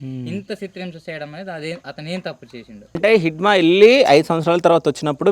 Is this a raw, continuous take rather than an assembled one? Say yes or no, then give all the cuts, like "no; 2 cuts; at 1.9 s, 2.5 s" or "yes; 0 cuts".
no; 1 cut; at 3.0 s